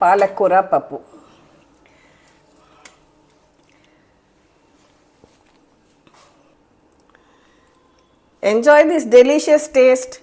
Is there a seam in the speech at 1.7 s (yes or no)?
no